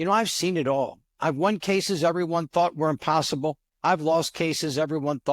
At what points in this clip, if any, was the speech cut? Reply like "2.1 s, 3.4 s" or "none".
3.7 s